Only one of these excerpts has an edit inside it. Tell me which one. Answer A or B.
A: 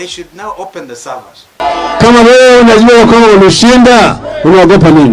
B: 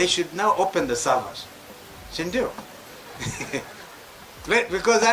A